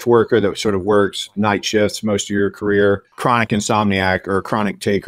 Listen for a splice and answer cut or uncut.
cut